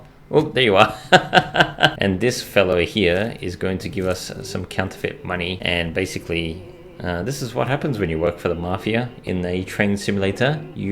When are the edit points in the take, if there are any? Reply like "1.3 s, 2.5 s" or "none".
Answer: 2.0 s, 5.6 s